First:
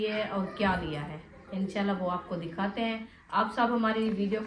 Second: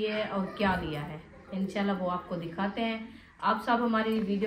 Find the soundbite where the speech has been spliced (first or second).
first